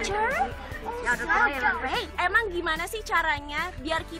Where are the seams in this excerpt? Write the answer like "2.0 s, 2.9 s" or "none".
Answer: 2.1 s